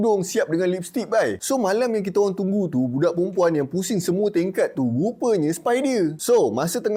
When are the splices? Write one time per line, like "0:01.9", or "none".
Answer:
0:01.4
0:06.2